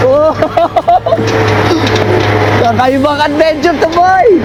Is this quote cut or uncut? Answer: uncut